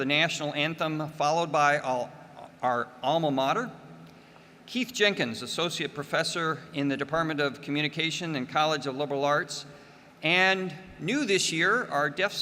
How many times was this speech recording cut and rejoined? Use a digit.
1